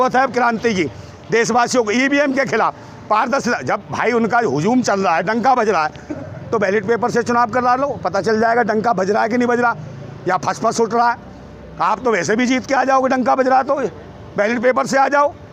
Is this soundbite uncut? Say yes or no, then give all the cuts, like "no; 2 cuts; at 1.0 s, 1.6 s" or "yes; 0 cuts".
yes; 0 cuts